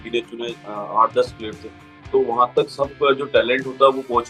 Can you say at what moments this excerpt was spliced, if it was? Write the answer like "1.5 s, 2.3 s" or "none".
2.0 s